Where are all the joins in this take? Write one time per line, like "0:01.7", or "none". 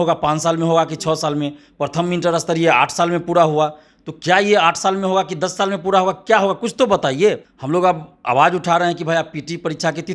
0:07.5